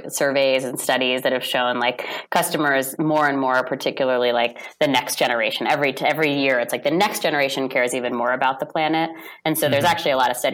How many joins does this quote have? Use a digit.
0